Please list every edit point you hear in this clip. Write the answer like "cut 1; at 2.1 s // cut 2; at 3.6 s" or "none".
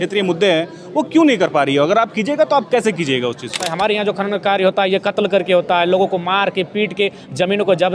cut 1; at 3.7 s